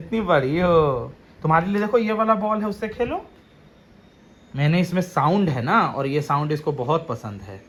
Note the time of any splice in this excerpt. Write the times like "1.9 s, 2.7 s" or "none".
none